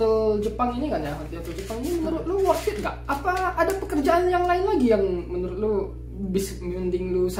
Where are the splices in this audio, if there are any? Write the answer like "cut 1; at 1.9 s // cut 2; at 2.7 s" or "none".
none